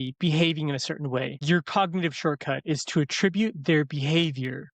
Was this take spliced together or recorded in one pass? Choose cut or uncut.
cut